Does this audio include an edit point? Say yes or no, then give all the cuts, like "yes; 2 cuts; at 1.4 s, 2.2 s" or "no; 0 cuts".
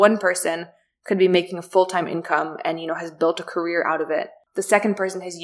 yes; 1 cut; at 4.4 s